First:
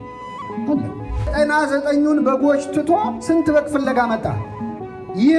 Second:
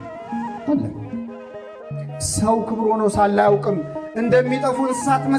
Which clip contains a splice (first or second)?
first